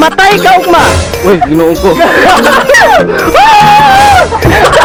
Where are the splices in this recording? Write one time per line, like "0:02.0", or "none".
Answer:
none